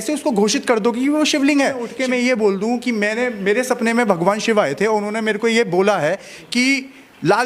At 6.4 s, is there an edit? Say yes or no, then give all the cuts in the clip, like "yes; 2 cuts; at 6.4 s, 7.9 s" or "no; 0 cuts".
no; 1 cut; at 1.9 s